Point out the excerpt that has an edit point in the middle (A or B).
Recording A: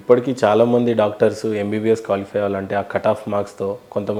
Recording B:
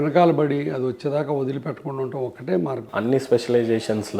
B